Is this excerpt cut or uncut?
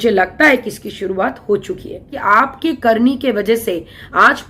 cut